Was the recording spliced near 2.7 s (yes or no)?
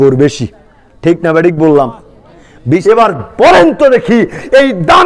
yes